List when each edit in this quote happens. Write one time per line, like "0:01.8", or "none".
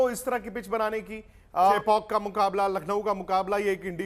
0:01.7